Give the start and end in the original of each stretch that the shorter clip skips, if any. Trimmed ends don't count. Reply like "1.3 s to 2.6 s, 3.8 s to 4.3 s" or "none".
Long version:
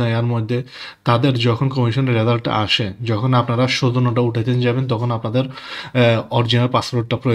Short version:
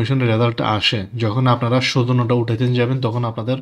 none